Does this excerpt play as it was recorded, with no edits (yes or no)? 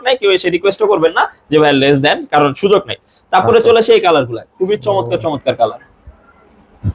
yes